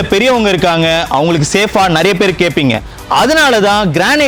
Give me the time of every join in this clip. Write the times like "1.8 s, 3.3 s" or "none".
none